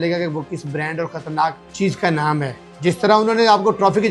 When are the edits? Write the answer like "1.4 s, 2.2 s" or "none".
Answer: 1.6 s, 2.6 s